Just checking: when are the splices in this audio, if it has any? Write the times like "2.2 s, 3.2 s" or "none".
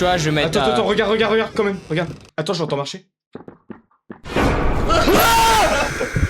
2.2 s